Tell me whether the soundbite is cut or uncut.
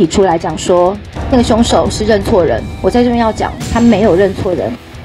cut